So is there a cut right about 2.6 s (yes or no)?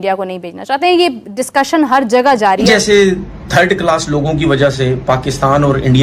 yes